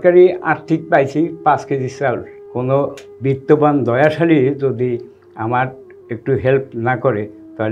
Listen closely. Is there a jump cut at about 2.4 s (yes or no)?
yes